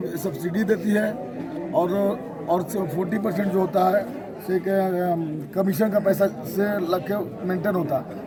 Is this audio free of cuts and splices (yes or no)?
yes